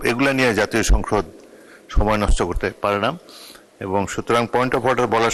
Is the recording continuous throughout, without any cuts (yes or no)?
yes